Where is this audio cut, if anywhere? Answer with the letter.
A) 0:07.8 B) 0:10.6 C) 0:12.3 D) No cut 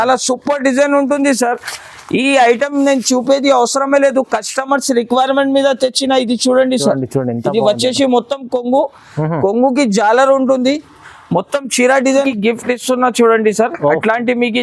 C